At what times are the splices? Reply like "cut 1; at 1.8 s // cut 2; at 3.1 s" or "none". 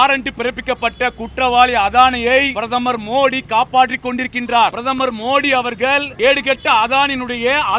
cut 1; at 2.6 s // cut 2; at 4.8 s // cut 3; at 6.1 s

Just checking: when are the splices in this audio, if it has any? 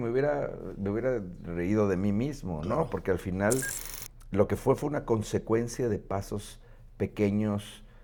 none

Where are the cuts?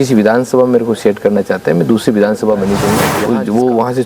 cut 1; at 3.1 s

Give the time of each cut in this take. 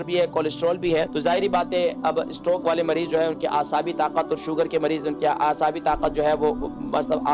cut 1; at 1.1 s

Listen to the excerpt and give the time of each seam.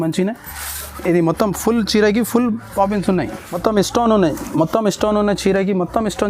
cut 1; at 3.5 s

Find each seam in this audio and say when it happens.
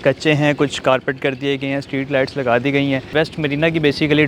cut 1; at 3.1 s

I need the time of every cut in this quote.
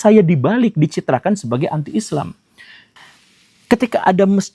none

